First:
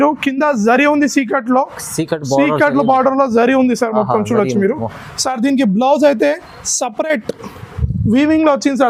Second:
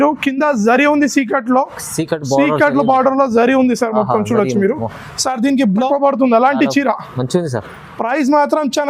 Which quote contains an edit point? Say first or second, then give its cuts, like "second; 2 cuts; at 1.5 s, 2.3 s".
second; 1 cut; at 5.9 s